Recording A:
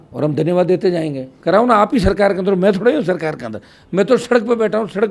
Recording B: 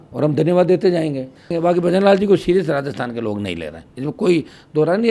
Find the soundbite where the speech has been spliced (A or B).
B